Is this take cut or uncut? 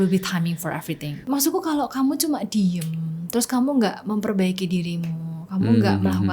cut